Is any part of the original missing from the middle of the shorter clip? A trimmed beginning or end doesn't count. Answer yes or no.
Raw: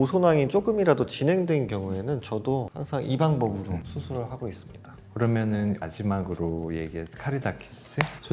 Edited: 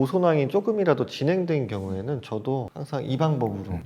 no